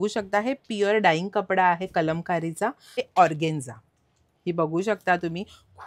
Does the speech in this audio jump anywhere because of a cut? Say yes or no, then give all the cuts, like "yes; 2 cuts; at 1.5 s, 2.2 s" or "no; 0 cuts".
yes; 1 cut; at 3.0 s